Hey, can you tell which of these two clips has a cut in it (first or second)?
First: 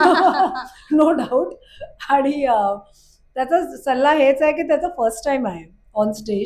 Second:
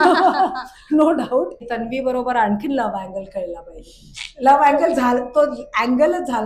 second